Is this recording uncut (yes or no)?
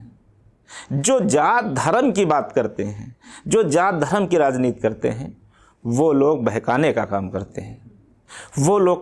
yes